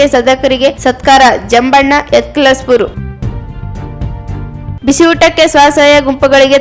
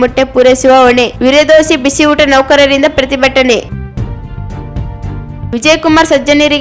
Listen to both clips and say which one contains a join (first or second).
first